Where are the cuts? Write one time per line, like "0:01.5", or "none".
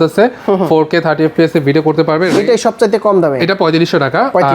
0:02.3